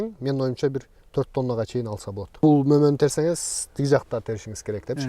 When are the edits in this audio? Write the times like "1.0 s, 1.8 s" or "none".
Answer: 2.3 s